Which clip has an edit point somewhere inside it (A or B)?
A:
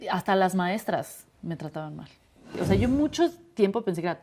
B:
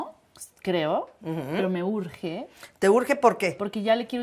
A